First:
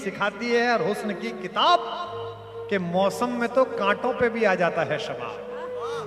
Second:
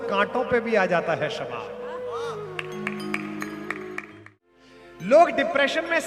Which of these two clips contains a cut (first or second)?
second